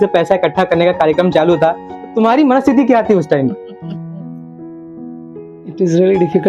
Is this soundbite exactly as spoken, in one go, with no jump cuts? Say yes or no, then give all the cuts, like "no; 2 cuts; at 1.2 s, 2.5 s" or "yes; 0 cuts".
yes; 0 cuts